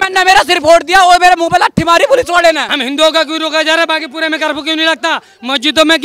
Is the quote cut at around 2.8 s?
yes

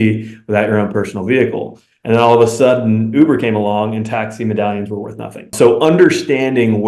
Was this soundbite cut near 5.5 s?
yes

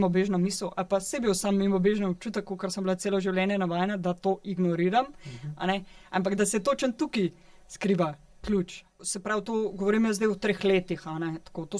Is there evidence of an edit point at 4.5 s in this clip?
no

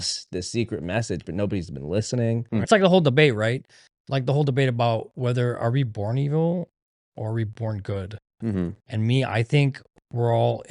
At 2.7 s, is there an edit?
yes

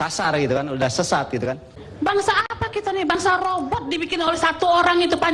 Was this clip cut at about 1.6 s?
yes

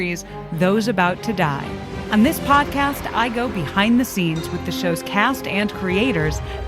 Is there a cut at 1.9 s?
yes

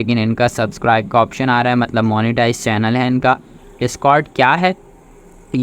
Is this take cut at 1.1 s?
no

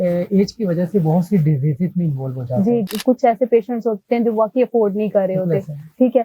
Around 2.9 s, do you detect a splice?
yes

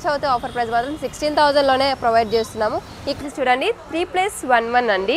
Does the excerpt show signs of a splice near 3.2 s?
yes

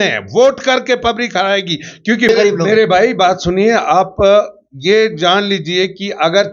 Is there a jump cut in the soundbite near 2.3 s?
yes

